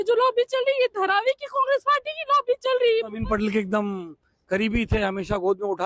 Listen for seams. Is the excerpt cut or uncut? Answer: cut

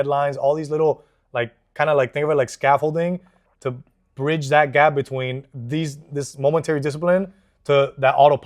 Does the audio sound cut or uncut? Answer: uncut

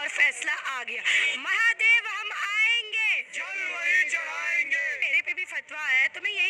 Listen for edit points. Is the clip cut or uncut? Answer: cut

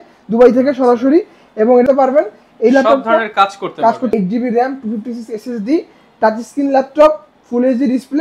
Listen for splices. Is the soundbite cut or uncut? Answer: cut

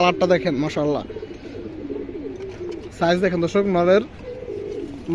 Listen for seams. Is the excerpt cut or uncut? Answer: uncut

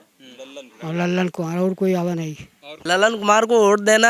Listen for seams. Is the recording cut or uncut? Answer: cut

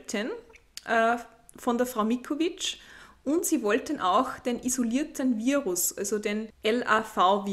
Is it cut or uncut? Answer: cut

